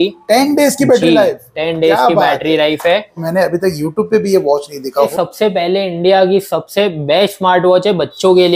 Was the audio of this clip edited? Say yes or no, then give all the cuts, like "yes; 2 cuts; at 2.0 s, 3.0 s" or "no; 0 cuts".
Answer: yes; 2 cuts; at 3.2 s, 5.1 s